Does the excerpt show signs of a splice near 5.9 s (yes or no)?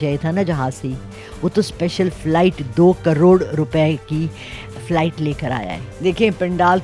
yes